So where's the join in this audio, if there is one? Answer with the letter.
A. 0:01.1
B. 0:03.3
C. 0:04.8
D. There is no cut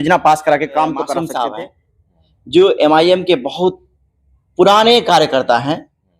A